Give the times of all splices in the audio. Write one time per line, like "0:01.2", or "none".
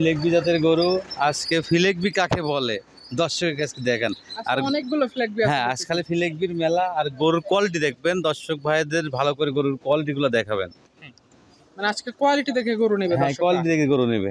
none